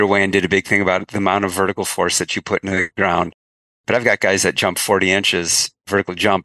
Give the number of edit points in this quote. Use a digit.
1